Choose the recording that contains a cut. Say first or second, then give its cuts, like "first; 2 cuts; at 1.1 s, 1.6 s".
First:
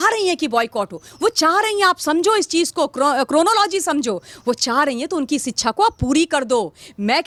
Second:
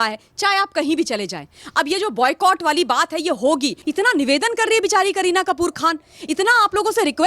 second; 1 cut; at 3.8 s